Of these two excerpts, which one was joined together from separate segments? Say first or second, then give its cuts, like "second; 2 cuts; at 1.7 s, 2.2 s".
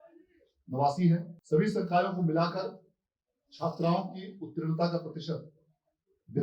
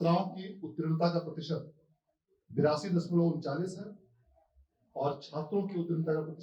first; 1 cut; at 1.3 s